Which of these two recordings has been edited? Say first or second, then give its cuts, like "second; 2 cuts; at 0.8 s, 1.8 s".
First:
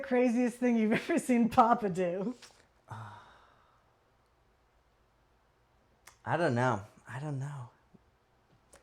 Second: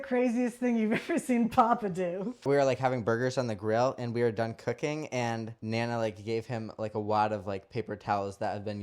second; 2 cuts; at 2.4 s, 5.5 s